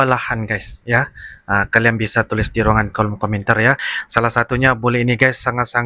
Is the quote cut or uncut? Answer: uncut